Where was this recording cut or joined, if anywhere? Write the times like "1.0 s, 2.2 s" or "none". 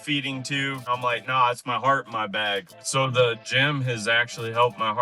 0.8 s, 2.7 s